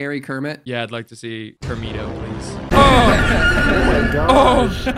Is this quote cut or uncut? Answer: uncut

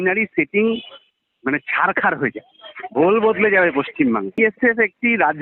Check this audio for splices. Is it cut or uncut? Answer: cut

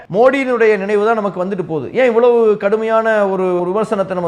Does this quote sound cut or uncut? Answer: uncut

